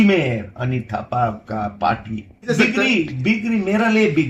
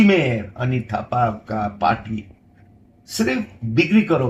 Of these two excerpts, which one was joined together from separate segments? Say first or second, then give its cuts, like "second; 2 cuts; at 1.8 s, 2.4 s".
first; 1 cut; at 2.5 s